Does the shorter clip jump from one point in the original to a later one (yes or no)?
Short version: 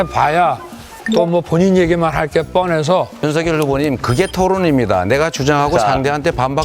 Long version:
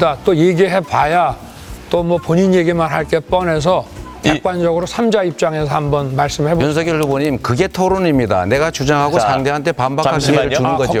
yes